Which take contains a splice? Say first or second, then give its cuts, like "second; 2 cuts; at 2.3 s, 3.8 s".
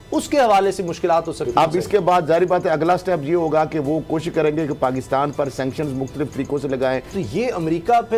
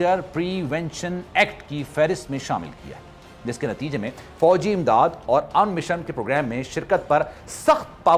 first; 2 cuts; at 1.8 s, 7.1 s